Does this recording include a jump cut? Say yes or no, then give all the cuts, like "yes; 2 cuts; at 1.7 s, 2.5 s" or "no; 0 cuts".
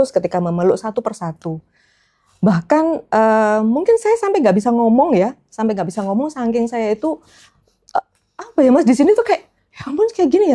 no; 0 cuts